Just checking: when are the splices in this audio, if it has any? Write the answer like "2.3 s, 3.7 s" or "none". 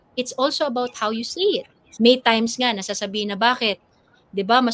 1.8 s